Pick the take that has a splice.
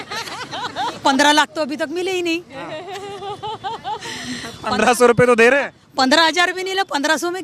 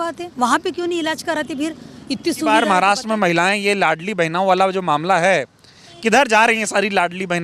second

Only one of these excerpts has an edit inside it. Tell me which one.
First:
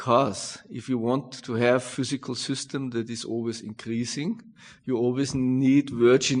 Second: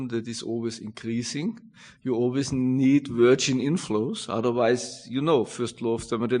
first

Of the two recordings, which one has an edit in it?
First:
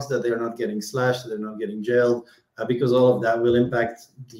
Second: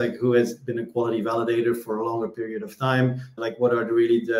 second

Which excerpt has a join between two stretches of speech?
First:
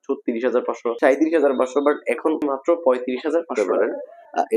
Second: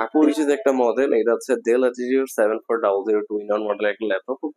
first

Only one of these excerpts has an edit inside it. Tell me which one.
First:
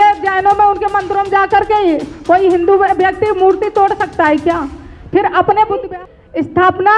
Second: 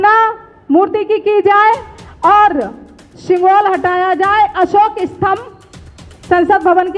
first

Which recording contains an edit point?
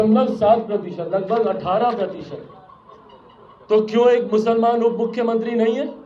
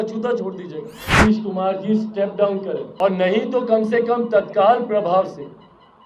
second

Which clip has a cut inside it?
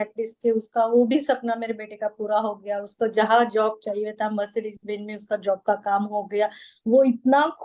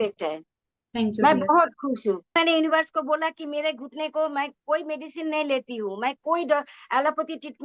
second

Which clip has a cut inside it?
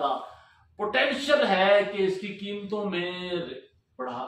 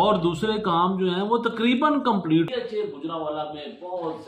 second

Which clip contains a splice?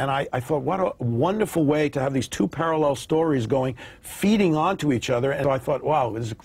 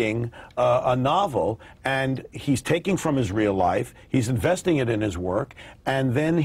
first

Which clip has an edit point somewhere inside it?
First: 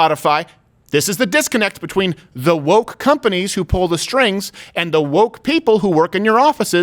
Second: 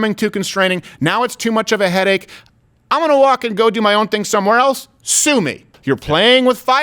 second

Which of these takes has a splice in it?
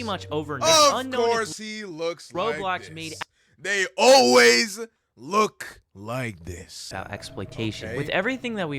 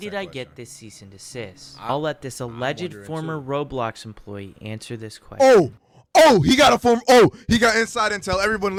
first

